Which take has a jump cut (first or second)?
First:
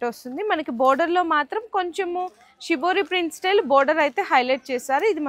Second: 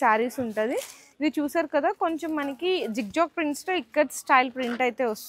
second